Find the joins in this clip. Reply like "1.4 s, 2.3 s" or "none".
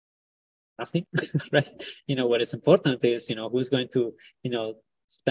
none

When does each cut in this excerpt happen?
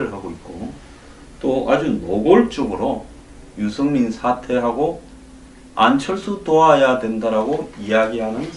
none

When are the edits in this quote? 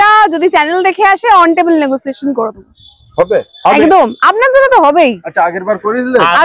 none

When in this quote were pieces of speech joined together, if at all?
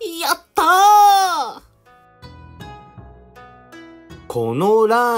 1.8 s, 4.0 s

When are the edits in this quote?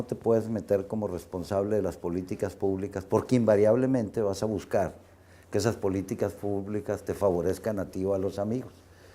2.7 s

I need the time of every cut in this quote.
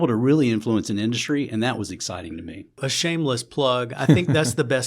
2.9 s

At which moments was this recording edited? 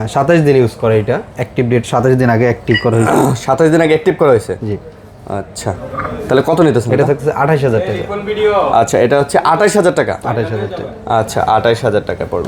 none

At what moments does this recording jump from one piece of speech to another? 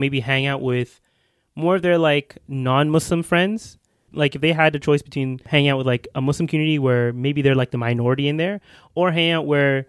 4.0 s, 5.4 s

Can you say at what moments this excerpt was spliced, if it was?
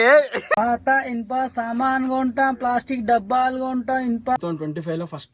4.4 s

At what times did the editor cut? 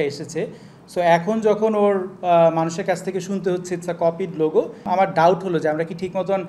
4.8 s

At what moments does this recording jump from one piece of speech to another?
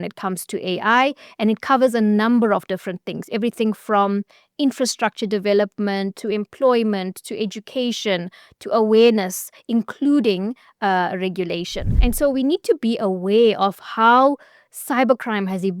11.8 s

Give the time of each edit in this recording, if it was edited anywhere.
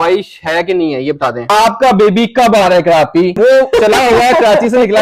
1.5 s

